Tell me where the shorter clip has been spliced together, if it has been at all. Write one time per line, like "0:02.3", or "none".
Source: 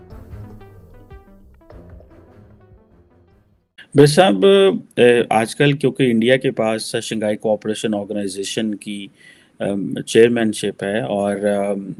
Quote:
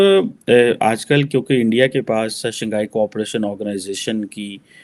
none